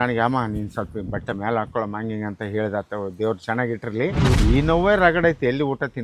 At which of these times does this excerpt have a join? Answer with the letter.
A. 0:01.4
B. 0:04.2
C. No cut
B